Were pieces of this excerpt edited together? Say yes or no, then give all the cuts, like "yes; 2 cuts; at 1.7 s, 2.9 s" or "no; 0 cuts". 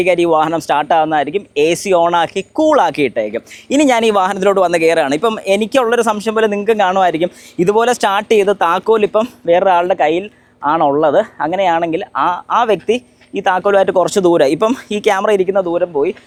no; 0 cuts